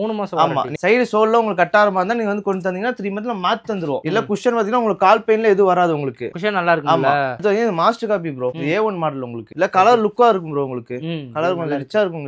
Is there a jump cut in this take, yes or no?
yes